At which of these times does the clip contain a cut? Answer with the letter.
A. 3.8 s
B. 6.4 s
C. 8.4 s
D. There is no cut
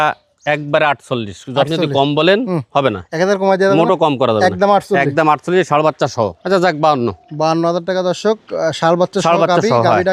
B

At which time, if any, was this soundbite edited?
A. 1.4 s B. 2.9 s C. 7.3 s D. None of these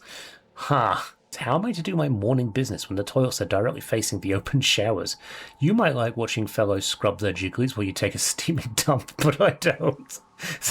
A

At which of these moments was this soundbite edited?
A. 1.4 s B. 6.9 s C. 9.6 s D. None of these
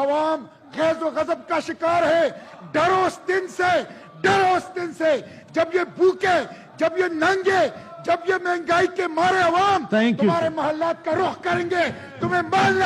D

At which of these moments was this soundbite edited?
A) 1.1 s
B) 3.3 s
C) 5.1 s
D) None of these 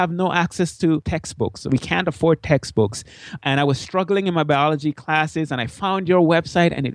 A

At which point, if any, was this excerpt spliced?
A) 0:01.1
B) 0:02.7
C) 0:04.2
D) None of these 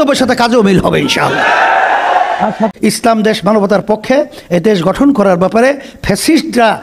B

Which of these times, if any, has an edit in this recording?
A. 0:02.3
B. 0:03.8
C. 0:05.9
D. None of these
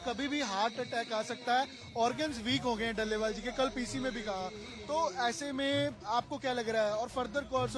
D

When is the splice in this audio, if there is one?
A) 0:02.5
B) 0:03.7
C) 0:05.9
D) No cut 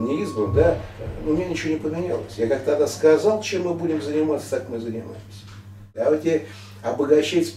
C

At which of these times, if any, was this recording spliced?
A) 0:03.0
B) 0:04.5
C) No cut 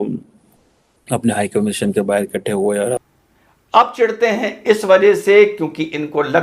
A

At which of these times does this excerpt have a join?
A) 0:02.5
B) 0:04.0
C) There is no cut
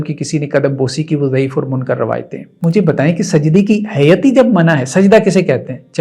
A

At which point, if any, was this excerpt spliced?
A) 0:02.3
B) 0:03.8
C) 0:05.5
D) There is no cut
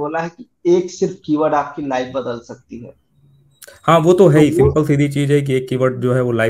D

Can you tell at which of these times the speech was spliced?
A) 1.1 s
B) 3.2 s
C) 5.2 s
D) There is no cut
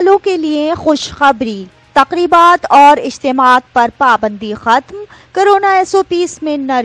D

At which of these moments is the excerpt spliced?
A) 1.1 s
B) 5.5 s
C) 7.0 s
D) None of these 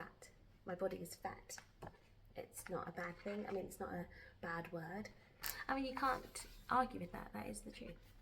B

